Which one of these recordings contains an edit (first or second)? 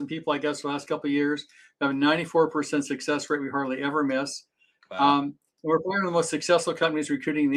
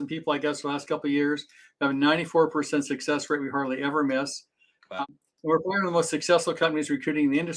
second